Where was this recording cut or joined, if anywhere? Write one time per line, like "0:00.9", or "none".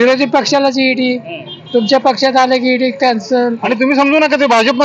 0:03.6